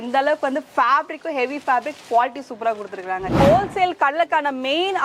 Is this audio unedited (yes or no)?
no